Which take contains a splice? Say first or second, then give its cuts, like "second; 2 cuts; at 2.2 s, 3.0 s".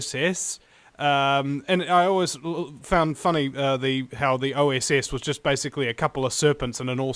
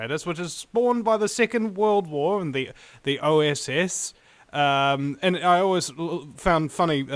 second; 1 cut; at 2.4 s